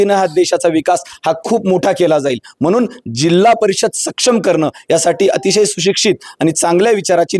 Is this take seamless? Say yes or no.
yes